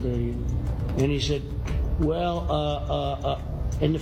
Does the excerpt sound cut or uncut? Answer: uncut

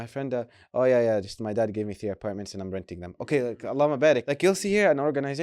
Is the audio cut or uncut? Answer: cut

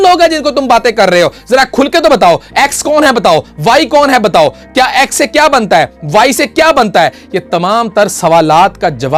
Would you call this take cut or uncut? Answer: uncut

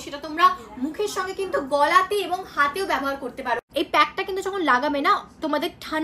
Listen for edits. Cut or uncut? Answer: cut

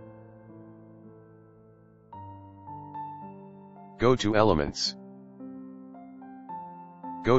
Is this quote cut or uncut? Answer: uncut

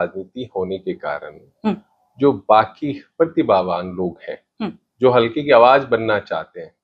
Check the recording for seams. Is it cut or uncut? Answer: uncut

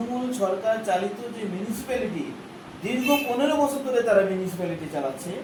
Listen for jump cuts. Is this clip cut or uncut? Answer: uncut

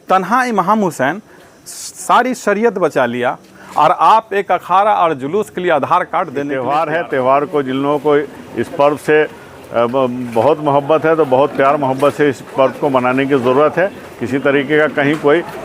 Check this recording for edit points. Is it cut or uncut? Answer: cut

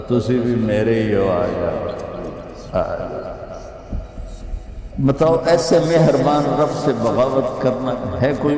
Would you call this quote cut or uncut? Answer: cut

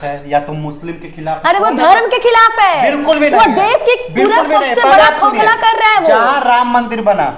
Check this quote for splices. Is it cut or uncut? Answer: uncut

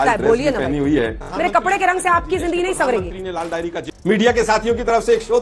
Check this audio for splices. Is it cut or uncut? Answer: cut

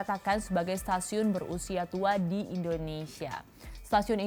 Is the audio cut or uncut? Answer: uncut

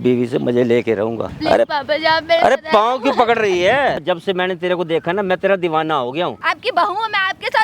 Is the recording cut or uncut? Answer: cut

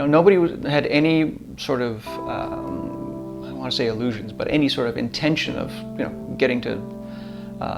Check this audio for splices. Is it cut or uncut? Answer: uncut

